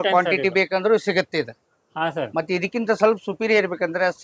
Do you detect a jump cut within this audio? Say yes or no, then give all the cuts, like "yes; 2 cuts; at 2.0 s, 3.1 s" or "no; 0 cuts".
no; 0 cuts